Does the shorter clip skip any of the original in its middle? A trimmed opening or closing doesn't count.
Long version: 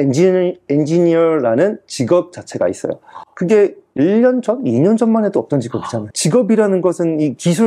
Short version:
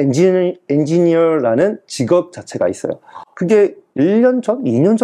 no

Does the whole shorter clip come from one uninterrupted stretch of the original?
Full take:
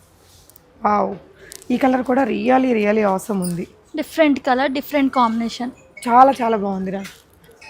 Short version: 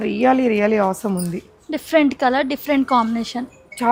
yes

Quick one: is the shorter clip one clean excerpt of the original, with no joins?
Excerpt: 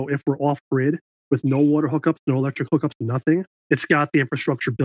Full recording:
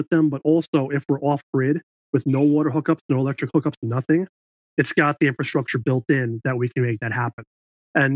no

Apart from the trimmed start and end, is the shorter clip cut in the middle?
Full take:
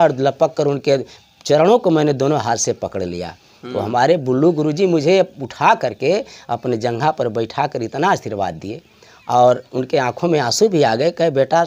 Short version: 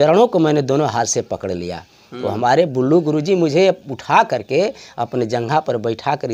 no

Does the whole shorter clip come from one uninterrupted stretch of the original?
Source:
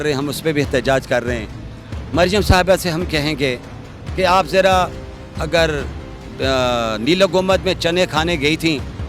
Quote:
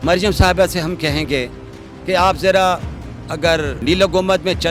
no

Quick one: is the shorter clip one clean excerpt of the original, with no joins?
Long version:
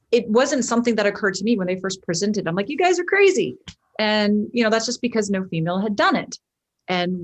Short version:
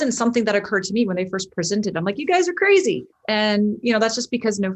no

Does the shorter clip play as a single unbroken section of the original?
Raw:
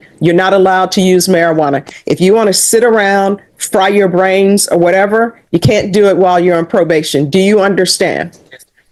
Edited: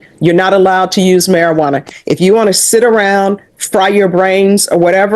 yes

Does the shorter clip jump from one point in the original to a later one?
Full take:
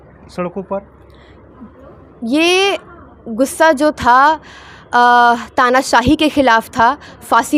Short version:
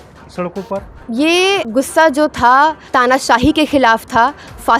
yes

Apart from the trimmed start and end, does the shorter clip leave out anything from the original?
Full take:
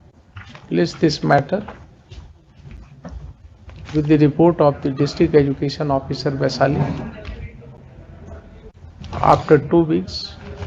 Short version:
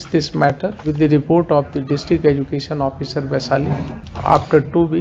yes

